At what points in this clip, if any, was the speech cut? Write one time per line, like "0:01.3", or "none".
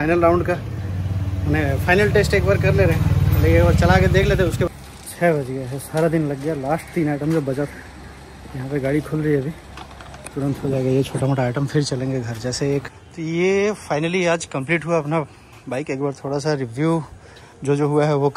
0:04.7
0:13.0